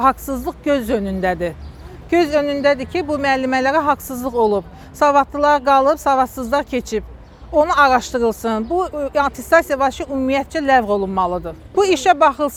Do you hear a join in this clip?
no; 0 cuts

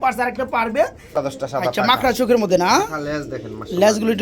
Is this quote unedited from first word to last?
no; 1 cut; at 1.1 s

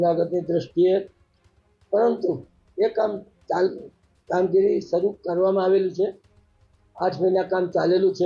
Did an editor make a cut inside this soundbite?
no; 0 cuts

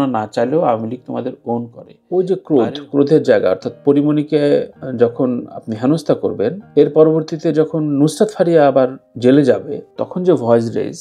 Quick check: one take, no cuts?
no; 1 cut; at 2.0 s

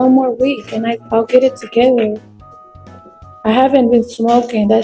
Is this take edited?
no; 0 cuts

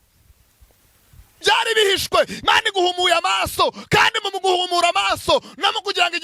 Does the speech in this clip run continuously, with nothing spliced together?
no; 1 cut; at 1.4 s

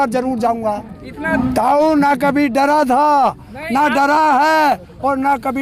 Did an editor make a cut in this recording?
yes; 1 cut; at 1.3 s

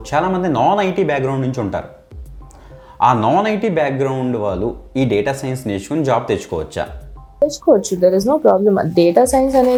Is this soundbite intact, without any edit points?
yes; 0 cuts

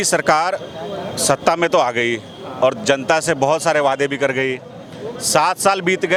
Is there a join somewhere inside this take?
no; 0 cuts

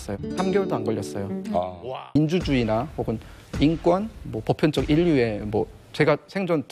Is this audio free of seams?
no; 1 cut; at 1.8 s

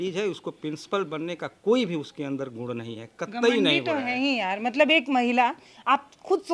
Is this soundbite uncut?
yes; 0 cuts

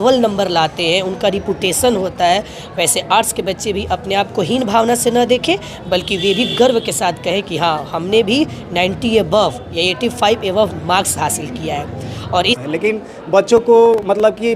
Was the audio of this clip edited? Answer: yes; 1 cut; at 12.6 s

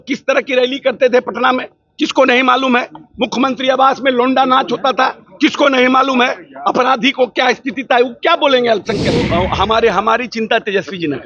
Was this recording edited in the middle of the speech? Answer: yes; 1 cut; at 9.3 s

